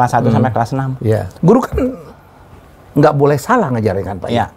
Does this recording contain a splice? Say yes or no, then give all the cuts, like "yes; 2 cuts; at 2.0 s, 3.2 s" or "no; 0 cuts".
yes; 1 cut; at 1.3 s